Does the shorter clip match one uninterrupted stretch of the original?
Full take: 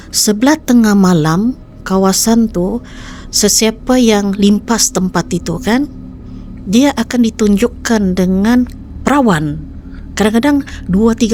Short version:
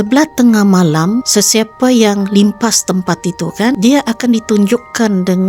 no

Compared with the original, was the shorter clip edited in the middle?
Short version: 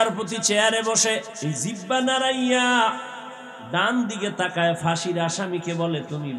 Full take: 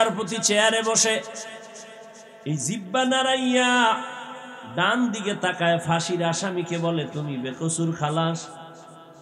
yes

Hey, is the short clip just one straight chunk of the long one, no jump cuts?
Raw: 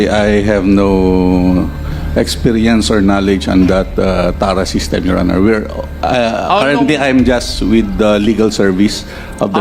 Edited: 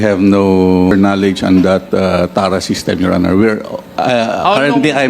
no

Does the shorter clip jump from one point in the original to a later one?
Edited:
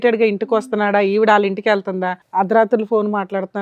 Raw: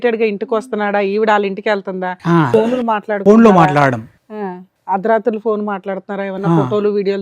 yes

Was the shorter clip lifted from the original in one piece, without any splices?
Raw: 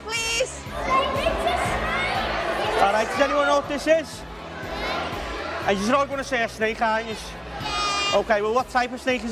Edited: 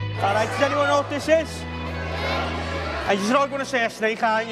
yes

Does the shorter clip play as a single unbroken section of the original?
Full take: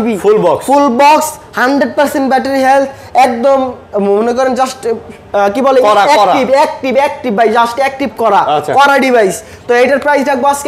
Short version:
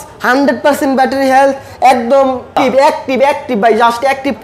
no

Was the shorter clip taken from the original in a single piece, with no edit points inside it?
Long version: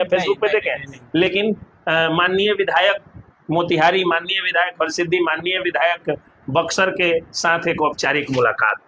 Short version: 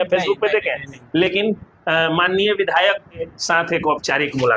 no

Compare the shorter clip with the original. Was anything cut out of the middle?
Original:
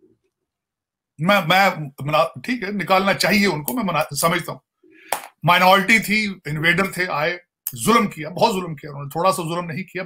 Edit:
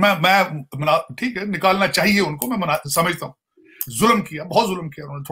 yes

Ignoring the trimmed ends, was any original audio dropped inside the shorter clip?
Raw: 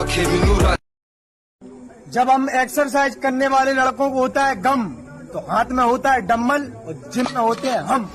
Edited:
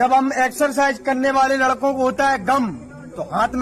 no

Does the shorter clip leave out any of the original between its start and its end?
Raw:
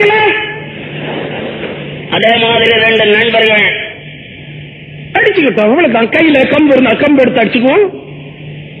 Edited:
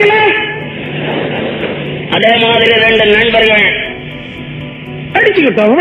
no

